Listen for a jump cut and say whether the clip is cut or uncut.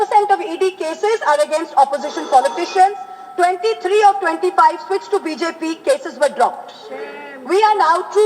uncut